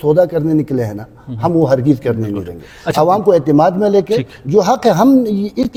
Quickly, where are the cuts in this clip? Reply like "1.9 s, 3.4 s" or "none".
none

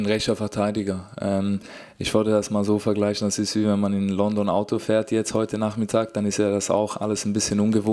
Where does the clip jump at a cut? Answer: none

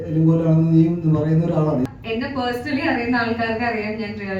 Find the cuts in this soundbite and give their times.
1.9 s

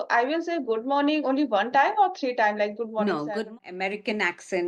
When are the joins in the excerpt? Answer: 3.5 s

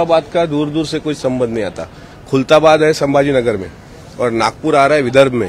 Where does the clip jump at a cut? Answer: none

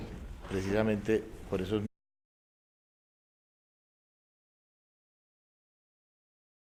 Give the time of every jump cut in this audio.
none

